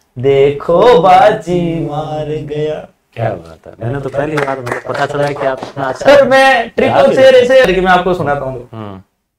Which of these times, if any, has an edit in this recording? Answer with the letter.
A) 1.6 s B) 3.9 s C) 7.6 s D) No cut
C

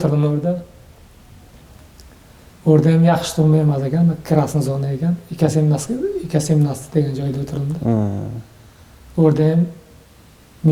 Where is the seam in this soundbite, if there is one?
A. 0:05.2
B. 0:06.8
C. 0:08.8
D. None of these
D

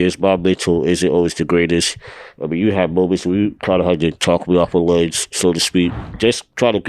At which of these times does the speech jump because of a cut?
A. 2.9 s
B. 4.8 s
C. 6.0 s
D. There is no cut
C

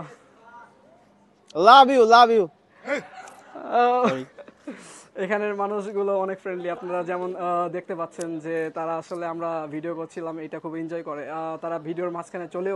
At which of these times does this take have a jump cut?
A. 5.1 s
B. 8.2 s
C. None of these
C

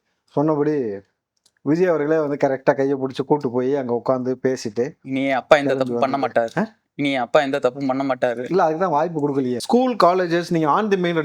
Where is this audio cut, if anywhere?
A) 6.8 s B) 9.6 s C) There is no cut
B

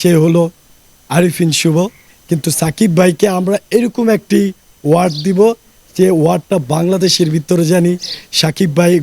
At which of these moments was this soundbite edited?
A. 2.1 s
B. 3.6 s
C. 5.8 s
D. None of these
A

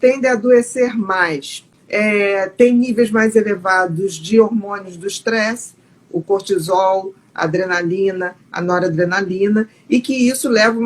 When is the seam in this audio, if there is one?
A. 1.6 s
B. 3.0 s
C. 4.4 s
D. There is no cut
A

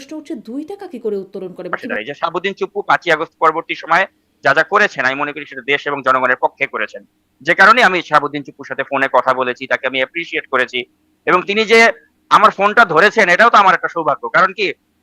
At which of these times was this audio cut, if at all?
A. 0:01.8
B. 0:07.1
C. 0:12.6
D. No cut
A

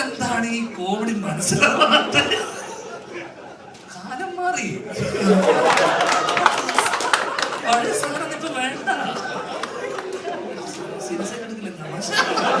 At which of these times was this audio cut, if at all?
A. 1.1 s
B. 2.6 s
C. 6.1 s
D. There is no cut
D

